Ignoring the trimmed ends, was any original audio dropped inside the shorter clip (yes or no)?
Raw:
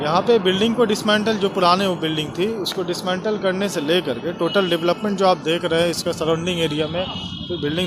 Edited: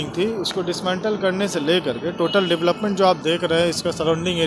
no